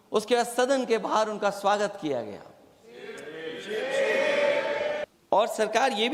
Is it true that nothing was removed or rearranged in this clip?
no; 1 cut; at 5.1 s

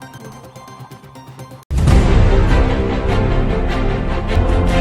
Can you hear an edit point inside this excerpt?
no; 0 cuts

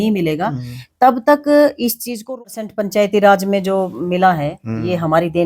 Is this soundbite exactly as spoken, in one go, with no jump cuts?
no; 1 cut; at 2.3 s

